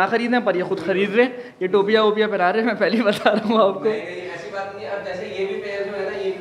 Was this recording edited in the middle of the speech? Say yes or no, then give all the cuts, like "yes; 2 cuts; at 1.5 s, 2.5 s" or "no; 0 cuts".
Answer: no; 0 cuts